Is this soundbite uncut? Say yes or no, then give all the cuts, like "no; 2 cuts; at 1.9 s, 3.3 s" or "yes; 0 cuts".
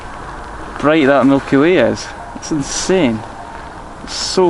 yes; 0 cuts